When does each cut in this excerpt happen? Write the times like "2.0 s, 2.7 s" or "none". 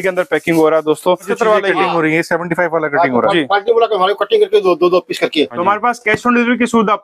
1.3 s, 5.6 s